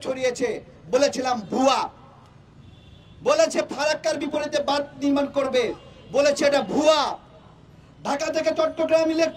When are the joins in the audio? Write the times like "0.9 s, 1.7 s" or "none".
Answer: none